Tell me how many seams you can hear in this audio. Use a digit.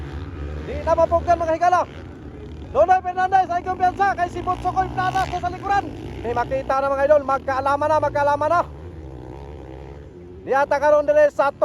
1